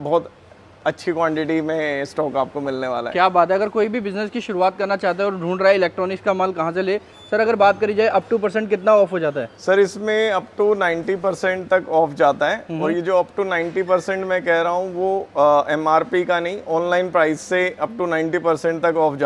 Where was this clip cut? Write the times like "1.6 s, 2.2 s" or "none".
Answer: none